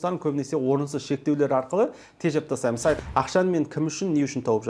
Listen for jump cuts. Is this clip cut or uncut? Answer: cut